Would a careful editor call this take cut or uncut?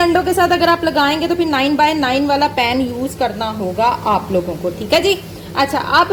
uncut